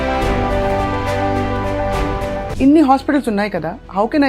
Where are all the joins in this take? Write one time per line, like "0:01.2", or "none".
0:02.4